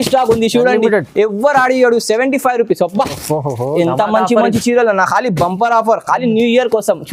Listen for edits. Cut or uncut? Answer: uncut